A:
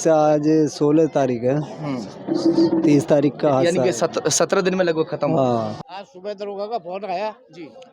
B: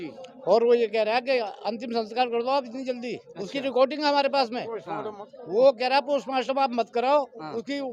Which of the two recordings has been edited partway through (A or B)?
A